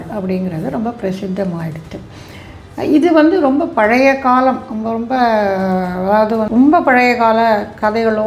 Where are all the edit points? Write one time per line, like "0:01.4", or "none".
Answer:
0:06.5